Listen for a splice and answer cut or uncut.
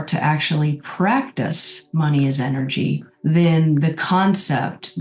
cut